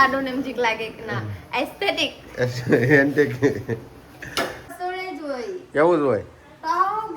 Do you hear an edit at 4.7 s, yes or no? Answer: yes